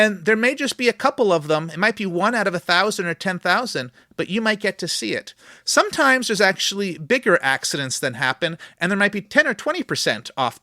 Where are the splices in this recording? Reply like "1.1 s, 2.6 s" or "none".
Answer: 9.3 s